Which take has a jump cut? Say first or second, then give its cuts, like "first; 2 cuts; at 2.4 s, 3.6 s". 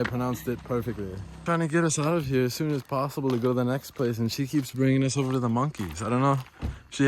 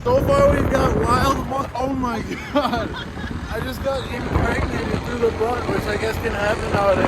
first; 1 cut; at 1.3 s